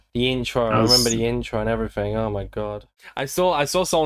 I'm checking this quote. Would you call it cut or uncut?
cut